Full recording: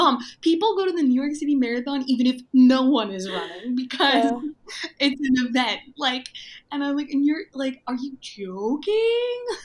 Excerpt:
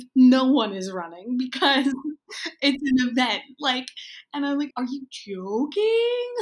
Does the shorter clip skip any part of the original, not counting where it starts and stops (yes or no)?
yes